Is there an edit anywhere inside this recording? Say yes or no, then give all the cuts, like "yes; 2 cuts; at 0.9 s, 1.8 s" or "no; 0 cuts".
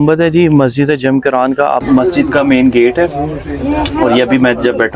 yes; 1 cut; at 1.8 s